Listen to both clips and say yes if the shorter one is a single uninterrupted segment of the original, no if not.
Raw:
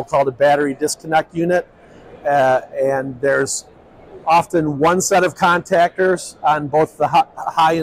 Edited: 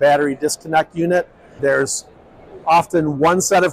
no